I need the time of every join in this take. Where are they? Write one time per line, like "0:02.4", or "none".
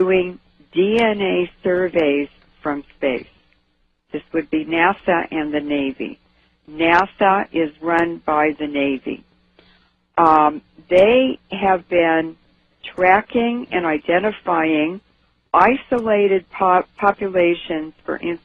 0:14.8